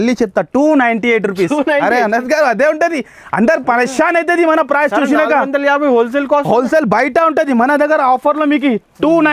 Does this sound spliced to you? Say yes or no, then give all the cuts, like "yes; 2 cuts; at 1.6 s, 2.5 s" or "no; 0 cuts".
no; 0 cuts